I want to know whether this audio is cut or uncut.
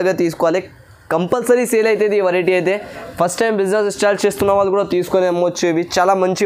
uncut